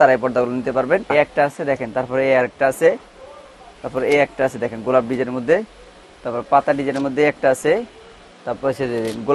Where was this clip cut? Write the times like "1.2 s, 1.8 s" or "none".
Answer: 1.1 s